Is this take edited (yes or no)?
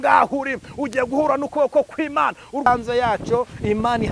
yes